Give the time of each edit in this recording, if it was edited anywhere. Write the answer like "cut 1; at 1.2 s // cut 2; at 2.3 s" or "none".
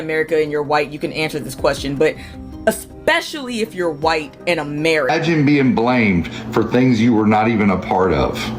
cut 1; at 5.1 s